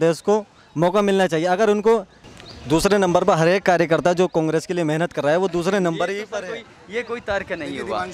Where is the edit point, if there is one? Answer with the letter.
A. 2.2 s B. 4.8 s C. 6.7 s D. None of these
A